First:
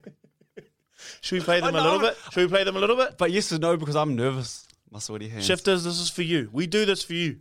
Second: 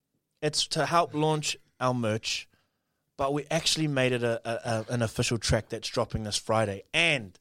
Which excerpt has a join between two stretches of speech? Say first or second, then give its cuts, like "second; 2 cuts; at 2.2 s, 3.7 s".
first; 1 cut; at 4.8 s